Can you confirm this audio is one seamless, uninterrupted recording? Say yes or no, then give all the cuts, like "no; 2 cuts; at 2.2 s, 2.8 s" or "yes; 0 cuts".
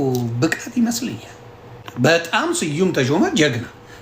no; 1 cut; at 1.8 s